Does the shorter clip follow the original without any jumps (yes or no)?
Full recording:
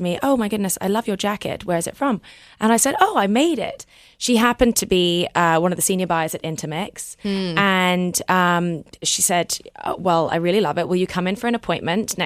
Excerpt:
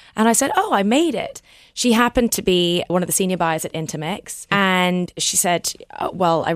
no